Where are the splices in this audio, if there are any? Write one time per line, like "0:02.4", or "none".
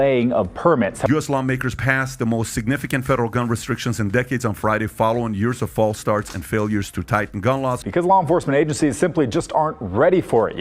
0:01.1
0:07.8